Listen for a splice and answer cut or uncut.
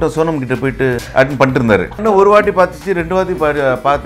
cut